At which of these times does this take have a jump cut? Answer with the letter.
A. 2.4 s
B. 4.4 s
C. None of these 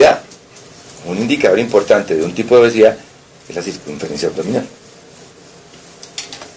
A